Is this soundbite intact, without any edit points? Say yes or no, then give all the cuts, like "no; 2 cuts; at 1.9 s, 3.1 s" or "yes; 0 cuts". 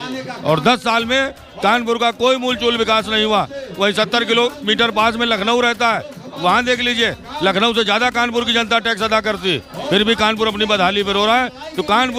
yes; 0 cuts